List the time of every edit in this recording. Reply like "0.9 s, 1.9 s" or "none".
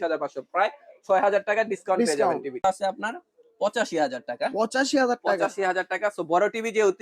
2.6 s